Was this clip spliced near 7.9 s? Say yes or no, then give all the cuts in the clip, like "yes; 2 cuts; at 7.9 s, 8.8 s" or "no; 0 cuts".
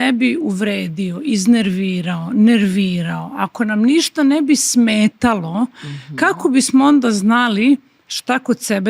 no; 0 cuts